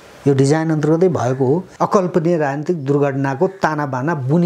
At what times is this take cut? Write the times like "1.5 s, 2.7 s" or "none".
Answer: 1.7 s